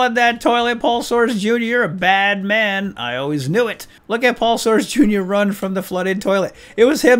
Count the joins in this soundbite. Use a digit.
1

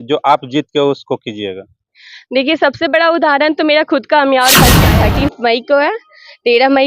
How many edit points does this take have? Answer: 1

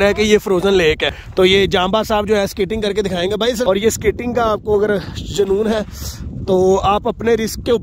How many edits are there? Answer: 2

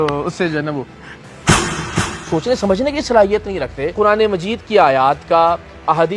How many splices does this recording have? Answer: 2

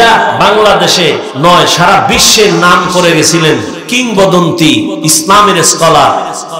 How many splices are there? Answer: 2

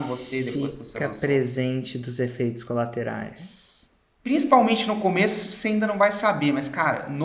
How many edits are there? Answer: 1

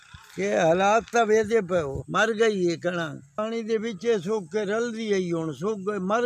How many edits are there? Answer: 2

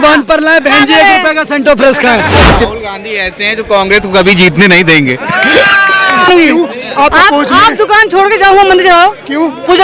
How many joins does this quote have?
2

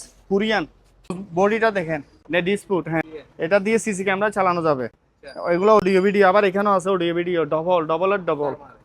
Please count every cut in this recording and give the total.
3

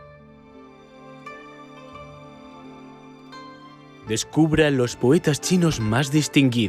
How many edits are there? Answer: 1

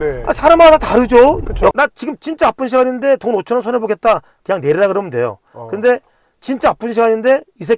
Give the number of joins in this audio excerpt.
1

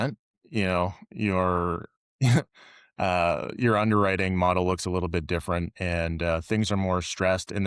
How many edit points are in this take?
0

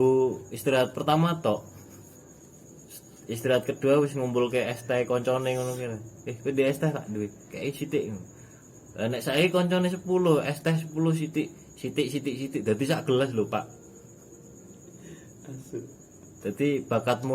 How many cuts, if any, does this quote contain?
1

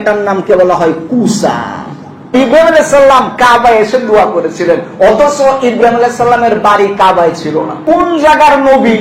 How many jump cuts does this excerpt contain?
2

